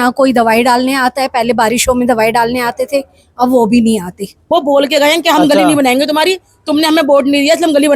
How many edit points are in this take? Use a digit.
1